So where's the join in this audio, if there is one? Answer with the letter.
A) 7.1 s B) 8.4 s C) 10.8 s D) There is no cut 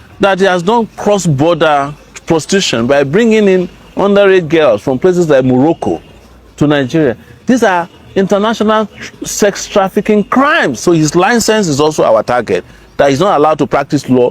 C